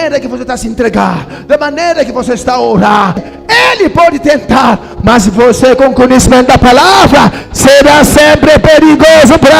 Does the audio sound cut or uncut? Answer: cut